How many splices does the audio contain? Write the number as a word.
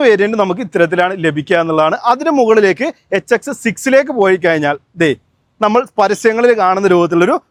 zero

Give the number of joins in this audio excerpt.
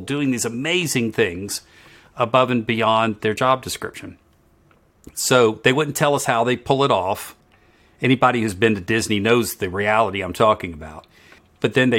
zero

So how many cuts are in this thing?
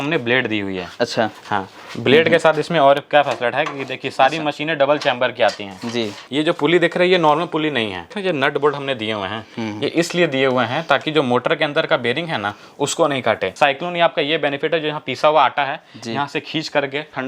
three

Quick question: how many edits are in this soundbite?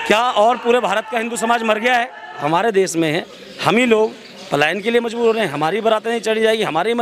one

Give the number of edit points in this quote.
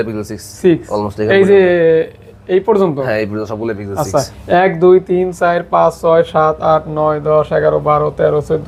zero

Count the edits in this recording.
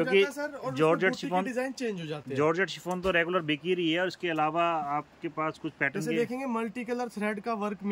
zero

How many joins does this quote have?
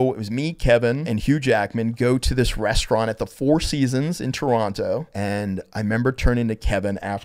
two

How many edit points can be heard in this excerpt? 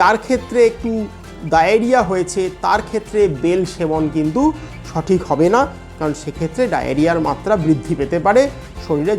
one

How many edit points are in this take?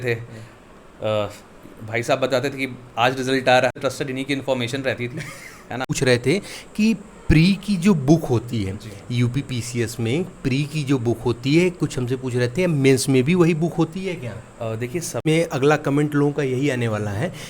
three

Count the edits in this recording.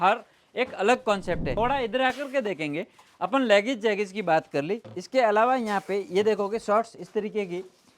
one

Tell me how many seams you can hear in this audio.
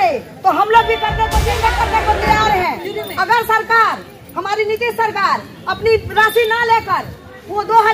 one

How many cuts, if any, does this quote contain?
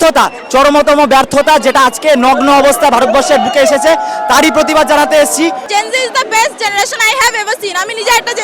one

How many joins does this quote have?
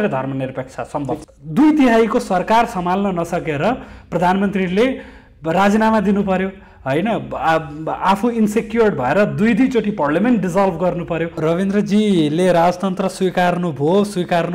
two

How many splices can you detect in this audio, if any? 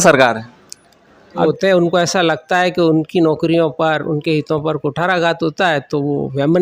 one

